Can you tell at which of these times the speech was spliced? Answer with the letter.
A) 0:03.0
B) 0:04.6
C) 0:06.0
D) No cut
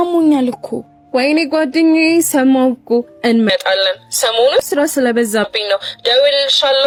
D